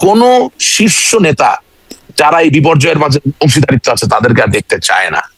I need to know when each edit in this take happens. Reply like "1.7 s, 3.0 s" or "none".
none